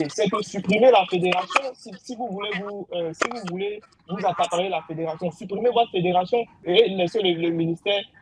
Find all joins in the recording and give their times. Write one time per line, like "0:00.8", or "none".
0:06.6